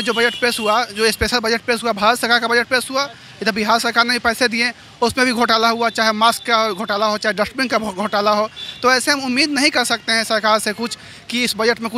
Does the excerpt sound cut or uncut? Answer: uncut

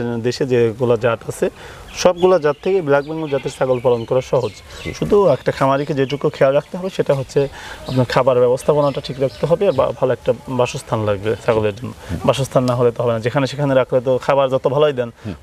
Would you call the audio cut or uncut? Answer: uncut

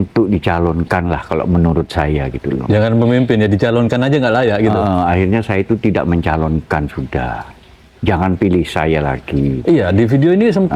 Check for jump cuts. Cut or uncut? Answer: uncut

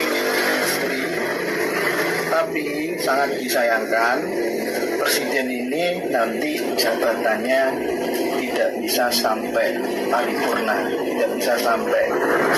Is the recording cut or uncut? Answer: uncut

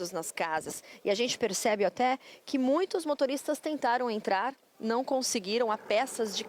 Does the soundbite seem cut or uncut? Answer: uncut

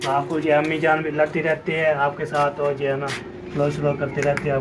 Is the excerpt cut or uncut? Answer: uncut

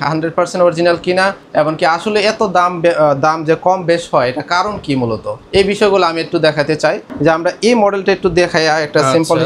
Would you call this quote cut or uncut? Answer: uncut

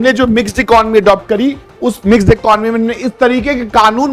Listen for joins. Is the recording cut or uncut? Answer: uncut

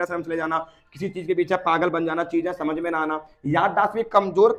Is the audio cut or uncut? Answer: uncut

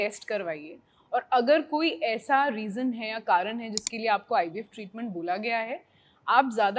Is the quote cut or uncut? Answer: uncut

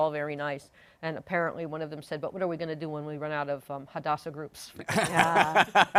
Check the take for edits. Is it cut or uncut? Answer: uncut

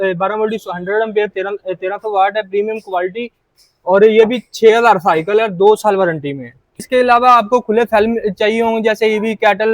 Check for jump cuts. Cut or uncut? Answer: cut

